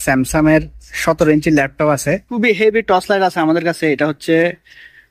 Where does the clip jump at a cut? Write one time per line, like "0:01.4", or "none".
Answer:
0:02.4